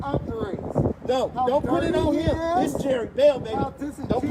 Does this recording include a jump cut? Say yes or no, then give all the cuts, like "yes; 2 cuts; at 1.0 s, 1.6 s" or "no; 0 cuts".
no; 0 cuts